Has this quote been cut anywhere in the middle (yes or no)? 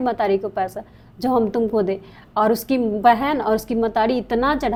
no